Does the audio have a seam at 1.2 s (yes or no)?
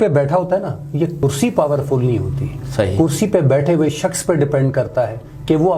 yes